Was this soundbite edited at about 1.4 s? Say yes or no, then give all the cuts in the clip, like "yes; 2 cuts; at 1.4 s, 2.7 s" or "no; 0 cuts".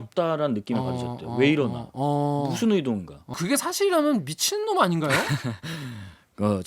no; 1 cut; at 3.4 s